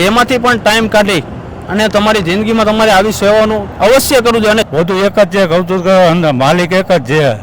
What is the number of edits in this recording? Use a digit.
1